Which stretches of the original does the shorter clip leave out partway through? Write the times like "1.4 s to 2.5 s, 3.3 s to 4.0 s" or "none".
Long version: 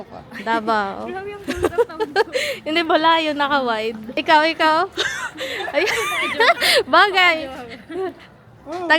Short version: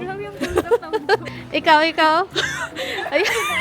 2.4 s to 4.0 s